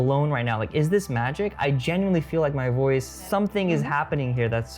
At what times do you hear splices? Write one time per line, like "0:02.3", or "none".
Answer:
0:03.2